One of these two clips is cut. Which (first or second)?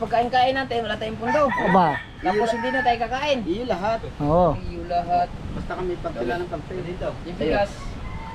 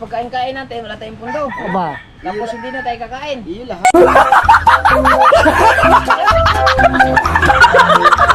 first